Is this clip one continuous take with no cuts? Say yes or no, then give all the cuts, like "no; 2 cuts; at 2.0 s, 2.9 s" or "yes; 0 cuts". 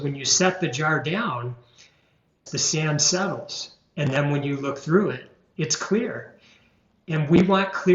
no; 1 cut; at 2.4 s